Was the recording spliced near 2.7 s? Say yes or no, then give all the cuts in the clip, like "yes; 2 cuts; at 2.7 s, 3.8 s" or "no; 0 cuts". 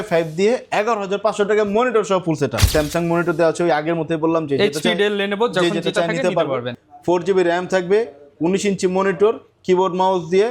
yes; 2 cuts; at 2.7 s, 6.7 s